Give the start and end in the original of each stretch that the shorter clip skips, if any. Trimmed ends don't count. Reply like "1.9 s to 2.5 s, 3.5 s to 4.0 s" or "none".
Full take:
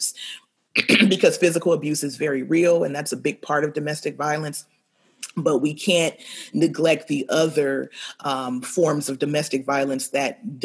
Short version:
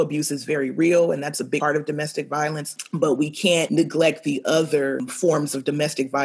3.3 s to 3.5 s, 4.6 s to 5.2 s, 6.1 s to 6.5 s, 7.9 s to 8.6 s